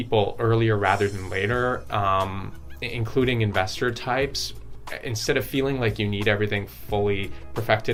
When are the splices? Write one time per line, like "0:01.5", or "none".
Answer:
none